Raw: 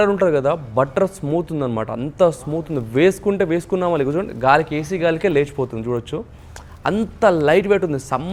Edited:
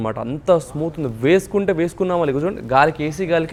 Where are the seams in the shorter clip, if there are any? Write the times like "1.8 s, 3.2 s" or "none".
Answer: none